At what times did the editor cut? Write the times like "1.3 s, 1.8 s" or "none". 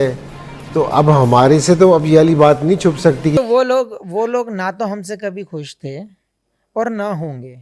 3.4 s